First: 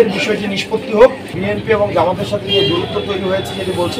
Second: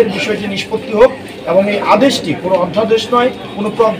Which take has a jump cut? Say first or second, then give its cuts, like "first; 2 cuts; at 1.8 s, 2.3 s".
first; 1 cut; at 1.4 s